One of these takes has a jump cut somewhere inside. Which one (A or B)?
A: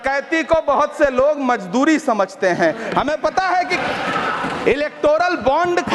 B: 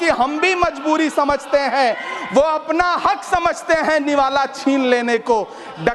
A